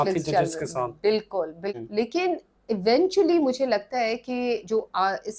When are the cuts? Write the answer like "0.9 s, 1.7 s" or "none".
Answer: 1.7 s